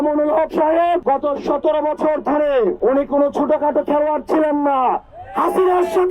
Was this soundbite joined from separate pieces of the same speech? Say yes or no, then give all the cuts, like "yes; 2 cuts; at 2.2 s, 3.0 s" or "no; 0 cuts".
yes; 2 cuts; at 1.0 s, 2.8 s